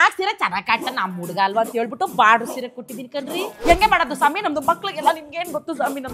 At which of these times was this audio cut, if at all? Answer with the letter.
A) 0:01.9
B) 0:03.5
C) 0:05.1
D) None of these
B